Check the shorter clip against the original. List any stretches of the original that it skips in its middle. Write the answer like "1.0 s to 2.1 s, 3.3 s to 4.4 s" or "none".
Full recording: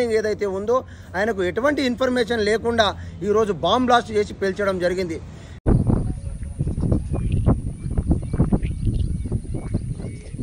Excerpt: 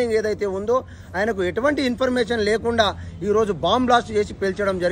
none